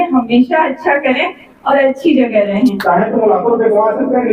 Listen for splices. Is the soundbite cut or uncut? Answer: cut